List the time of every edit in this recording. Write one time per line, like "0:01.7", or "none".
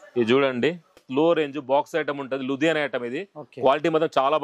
0:01.1